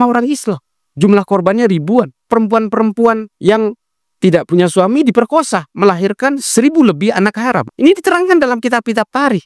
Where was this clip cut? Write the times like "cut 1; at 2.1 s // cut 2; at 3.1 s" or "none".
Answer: cut 1; at 2.2 s